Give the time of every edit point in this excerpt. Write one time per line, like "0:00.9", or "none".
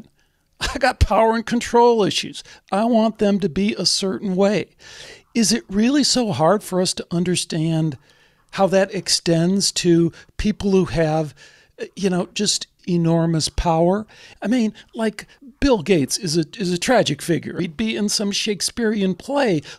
0:12.7
0:14.3
0:15.4
0:17.6